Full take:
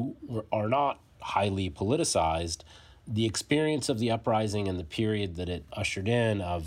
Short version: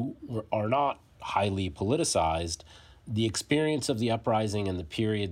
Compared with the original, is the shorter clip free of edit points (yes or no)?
yes